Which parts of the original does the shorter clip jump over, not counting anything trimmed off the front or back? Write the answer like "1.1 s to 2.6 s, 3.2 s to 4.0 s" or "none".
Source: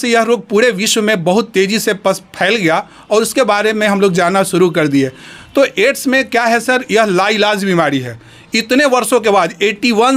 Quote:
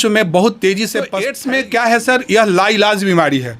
2.2 s to 5.8 s